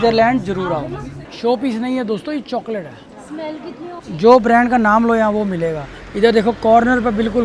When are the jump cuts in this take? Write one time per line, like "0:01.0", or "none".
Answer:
0:01.2
0:04.0